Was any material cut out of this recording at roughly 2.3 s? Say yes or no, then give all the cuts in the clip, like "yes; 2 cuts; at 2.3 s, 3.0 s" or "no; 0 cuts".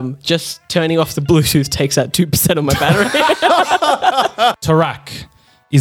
no; 1 cut; at 4.6 s